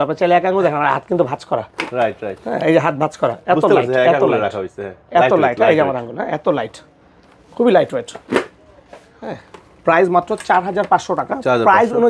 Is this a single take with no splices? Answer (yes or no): yes